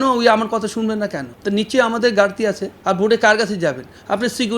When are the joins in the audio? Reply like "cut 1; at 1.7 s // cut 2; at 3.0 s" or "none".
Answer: cut 1; at 1.3 s // cut 2; at 2.7 s